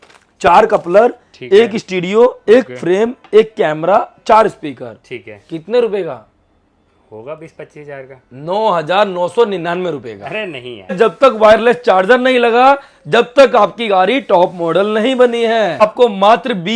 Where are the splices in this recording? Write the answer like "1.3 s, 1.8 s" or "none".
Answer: 10.9 s, 15.8 s